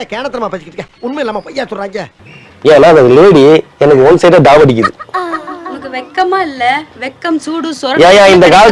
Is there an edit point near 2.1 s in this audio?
yes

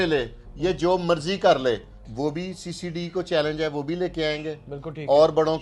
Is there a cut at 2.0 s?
yes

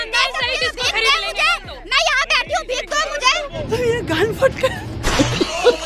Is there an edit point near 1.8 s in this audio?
no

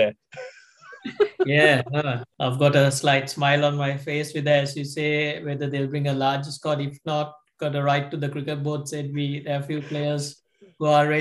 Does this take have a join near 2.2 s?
yes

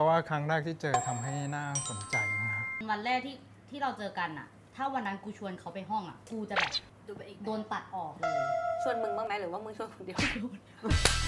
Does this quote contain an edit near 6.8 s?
no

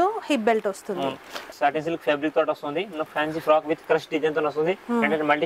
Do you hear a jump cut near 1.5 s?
yes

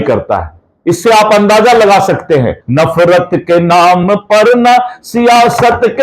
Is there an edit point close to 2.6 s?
yes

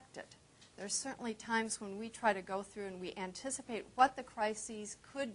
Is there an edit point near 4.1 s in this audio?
no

